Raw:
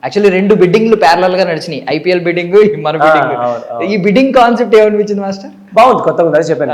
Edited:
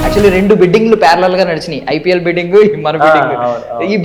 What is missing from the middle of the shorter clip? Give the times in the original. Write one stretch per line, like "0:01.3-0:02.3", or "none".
none